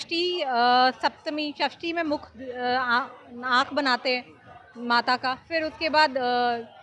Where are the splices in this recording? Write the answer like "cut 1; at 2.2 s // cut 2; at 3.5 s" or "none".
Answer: none